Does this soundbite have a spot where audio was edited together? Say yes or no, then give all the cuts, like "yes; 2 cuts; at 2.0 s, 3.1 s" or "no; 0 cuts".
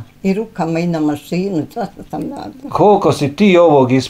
no; 0 cuts